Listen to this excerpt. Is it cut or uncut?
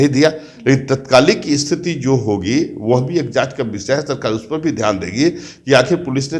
uncut